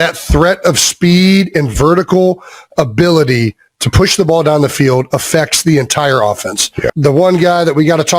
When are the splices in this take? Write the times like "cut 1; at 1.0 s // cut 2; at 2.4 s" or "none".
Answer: cut 1; at 6.9 s